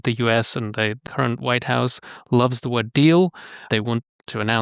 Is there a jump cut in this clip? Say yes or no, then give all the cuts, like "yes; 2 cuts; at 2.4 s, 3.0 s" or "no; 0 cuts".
yes; 2 cuts; at 1.0 s, 3.6 s